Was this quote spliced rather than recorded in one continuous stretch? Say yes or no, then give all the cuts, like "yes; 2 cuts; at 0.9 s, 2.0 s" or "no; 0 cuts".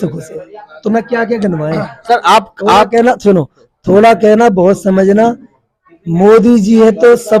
no; 0 cuts